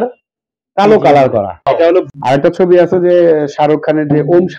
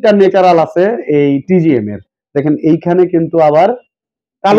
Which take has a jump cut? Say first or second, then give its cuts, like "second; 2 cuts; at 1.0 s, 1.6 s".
first; 1 cut; at 1.9 s